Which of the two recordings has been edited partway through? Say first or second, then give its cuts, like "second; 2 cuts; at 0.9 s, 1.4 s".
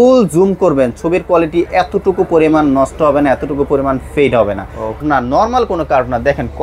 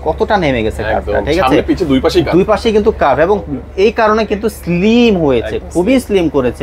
first; 1 cut; at 5.0 s